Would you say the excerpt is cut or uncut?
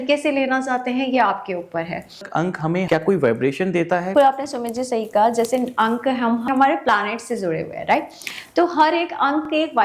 cut